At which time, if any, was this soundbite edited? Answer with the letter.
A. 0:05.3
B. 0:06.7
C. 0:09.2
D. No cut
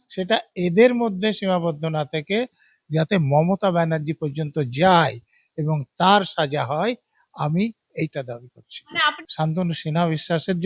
C